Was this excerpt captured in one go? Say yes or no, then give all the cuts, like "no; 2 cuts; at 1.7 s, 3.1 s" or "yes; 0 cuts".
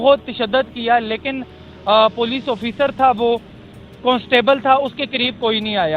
yes; 0 cuts